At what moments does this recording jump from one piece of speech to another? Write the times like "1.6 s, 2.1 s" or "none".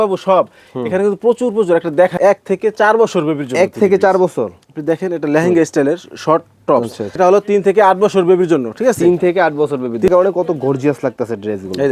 2.1 s, 7.0 s, 10.1 s

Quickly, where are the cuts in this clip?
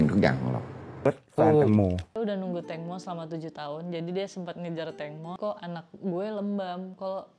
1.1 s, 5.4 s

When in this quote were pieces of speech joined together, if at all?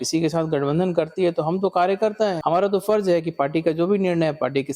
2.4 s

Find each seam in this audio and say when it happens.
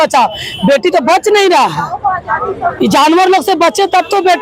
none

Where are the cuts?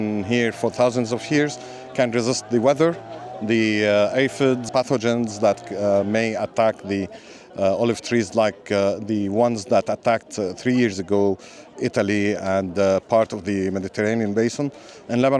4.6 s

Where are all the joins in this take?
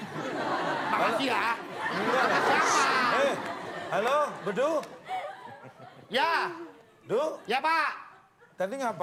none

